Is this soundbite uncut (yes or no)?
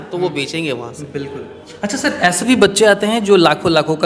yes